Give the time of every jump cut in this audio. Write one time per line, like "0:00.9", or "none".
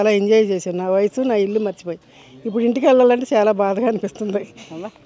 none